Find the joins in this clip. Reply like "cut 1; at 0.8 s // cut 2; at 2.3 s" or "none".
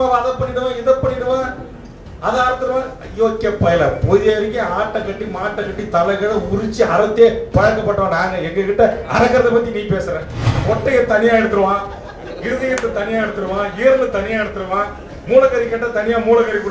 cut 1; at 10.6 s